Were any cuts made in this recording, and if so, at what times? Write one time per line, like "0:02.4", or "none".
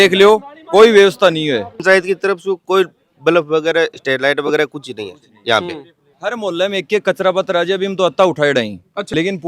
0:01.8
0:06.0